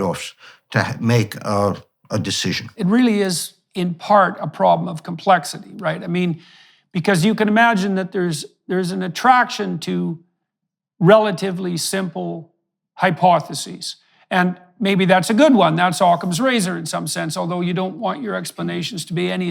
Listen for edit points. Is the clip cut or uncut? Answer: cut